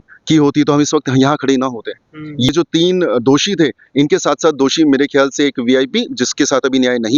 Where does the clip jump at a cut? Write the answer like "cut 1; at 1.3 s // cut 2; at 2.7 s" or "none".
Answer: cut 1; at 2.5 s